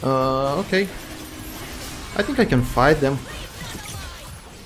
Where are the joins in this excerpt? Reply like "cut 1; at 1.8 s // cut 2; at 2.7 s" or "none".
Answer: cut 1; at 3.2 s